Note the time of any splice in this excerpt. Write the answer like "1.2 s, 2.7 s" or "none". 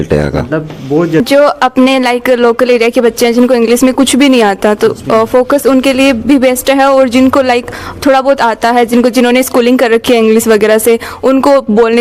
1.2 s